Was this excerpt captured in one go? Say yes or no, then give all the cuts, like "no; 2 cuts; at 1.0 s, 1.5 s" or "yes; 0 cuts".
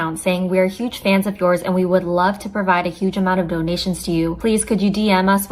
no; 1 cut; at 4.0 s